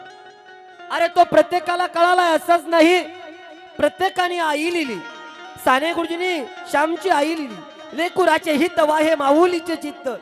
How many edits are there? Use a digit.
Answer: 0